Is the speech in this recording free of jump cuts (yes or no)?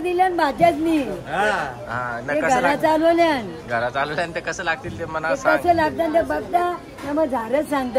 yes